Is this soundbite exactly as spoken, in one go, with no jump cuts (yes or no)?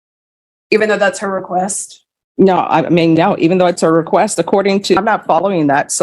no